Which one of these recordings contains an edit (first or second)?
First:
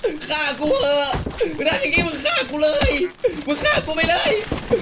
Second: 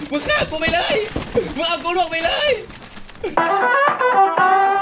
second